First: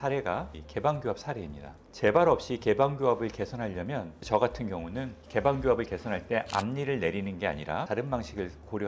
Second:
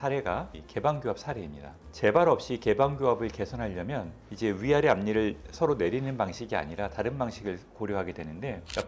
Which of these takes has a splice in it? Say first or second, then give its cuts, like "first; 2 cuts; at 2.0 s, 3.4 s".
first; 2 cuts; at 4.2 s, 7.9 s